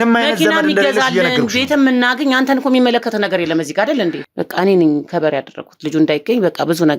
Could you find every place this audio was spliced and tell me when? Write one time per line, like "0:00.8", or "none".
0:04.2